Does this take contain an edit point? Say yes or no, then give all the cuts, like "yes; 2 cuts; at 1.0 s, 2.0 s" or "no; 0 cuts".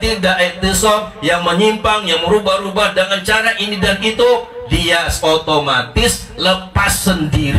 no; 0 cuts